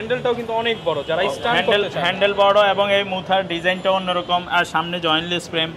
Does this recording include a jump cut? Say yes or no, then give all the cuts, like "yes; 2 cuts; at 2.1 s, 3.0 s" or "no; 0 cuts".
no; 0 cuts